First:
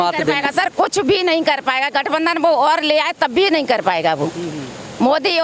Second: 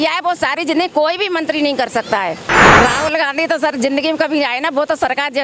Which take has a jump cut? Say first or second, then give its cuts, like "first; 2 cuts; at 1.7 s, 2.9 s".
second; 1 cut; at 2.8 s